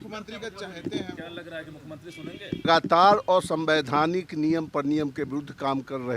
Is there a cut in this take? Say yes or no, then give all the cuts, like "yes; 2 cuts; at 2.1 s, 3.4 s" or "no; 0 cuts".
yes; 1 cut; at 2.6 s